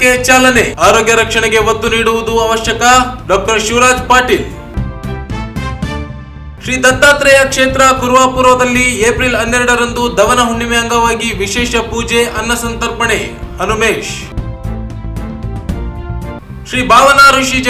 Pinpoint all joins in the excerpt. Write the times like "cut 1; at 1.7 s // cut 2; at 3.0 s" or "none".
none